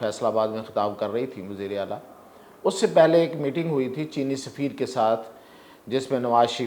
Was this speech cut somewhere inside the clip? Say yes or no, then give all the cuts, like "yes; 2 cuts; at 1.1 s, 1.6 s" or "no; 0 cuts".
no; 0 cuts